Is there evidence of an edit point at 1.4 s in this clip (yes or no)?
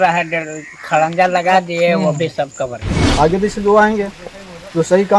no